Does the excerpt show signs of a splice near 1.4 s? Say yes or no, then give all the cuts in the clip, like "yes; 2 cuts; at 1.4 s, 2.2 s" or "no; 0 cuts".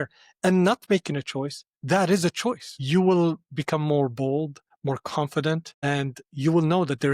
no; 3 cuts; at 2.8 s, 4.6 s, 5.7 s